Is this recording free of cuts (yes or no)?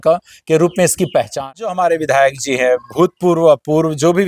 no